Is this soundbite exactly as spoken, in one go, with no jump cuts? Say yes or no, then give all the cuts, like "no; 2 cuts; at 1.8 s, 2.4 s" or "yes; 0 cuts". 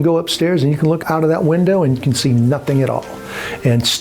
no; 1 cut; at 1.0 s